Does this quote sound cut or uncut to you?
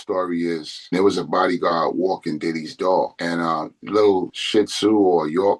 cut